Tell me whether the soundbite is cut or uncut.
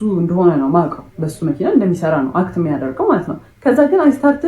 uncut